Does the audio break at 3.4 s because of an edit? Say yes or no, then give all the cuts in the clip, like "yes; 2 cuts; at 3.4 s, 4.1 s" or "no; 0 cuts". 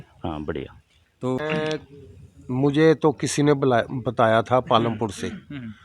no; 1 cut; at 1.4 s